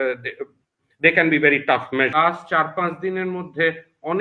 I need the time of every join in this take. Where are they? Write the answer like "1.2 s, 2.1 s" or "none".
2.1 s